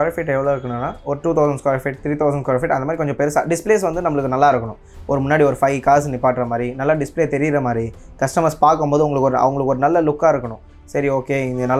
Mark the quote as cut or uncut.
uncut